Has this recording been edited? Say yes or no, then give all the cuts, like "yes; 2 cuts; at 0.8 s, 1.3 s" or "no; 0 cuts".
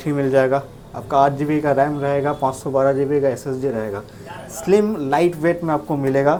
no; 0 cuts